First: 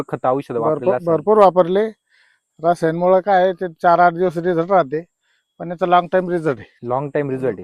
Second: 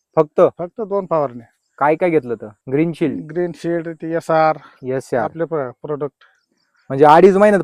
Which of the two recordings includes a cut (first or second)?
first